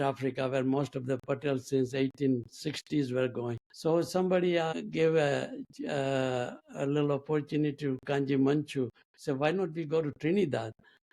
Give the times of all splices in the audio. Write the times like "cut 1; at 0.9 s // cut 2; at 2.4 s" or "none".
cut 1; at 3.6 s // cut 2; at 4.7 s // cut 3; at 6.6 s // cut 4; at 9.1 s